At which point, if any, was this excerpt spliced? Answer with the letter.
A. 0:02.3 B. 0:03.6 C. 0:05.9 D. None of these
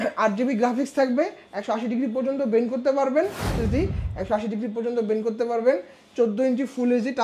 B